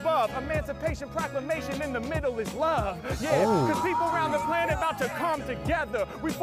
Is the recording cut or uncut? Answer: uncut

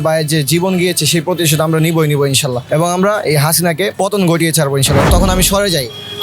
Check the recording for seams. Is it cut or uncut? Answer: cut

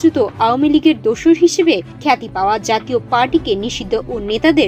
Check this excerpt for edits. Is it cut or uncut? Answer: uncut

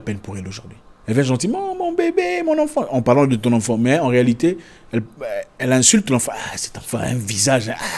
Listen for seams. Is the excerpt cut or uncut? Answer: cut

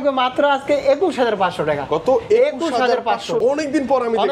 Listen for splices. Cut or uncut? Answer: cut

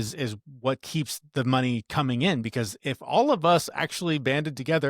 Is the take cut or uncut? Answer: uncut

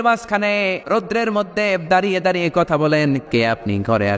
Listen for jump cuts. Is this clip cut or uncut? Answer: cut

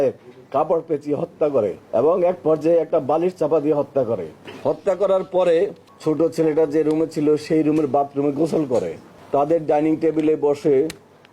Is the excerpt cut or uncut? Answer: cut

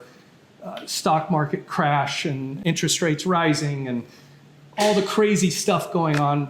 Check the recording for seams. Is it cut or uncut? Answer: cut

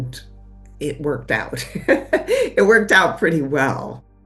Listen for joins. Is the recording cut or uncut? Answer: uncut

